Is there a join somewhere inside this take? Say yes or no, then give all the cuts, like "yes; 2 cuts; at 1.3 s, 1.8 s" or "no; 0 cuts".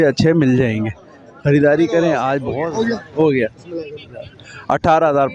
yes; 1 cut; at 2.6 s